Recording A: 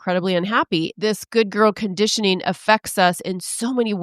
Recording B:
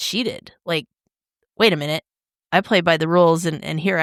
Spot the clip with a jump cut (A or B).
A